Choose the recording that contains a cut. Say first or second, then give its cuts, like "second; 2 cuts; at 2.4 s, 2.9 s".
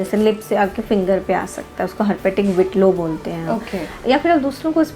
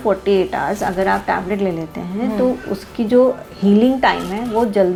first; 1 cut; at 4.0 s